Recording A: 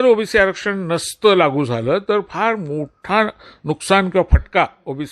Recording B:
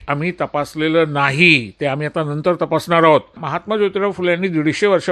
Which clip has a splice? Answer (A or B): B